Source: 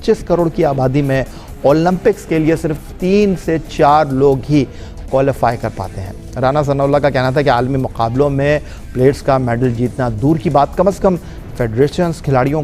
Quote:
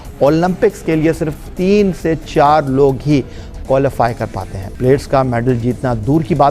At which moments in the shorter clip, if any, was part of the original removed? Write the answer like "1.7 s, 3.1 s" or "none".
4.6 s